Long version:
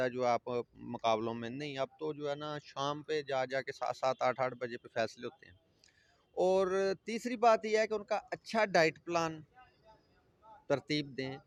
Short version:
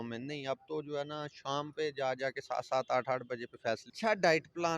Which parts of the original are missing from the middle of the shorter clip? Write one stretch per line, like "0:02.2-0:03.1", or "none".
0:05.2-0:08.4